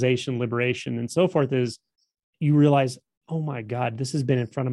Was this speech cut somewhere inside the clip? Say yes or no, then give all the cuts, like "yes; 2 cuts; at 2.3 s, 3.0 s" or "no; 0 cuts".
no; 0 cuts